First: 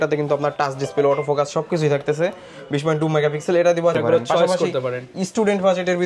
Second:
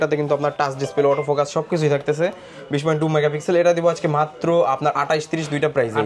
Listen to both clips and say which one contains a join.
first; 1 cut; at 4.0 s

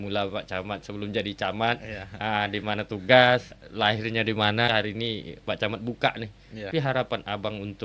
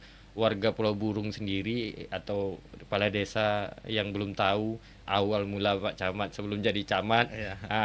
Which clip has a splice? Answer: first; 3 cuts; at 3.6 s, 4.7 s, 6.7 s

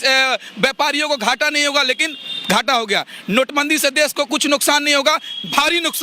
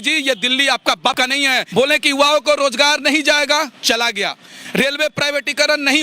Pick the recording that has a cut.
second; 1 cut; at 1.4 s

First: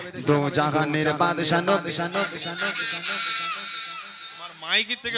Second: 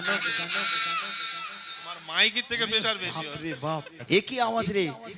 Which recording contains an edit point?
second; 1 cut; at 3.9 s

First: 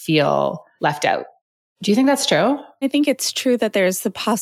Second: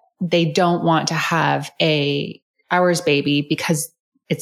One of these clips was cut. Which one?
first; 1 cut; at 2.9 s

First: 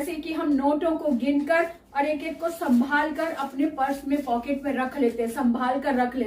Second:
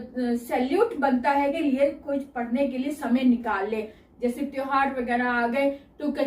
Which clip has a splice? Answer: second; 1 cut; at 1.6 s

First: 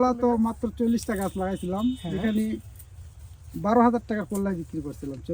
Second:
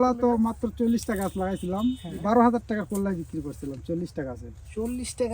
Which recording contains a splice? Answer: second; 1 cut; at 2.1 s

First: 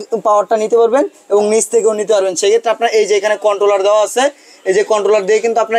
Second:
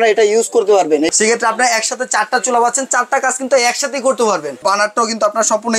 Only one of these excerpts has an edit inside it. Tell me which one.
second; 2 cuts; at 1.1 s, 4.6 s

